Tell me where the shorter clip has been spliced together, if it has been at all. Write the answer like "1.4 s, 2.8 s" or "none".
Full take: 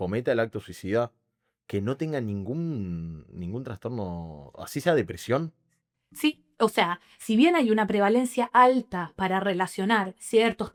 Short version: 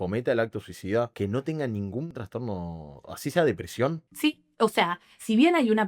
1.1 s, 2.1 s, 4.1 s